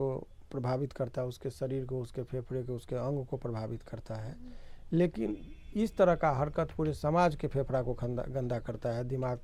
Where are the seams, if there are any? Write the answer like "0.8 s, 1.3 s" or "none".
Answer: none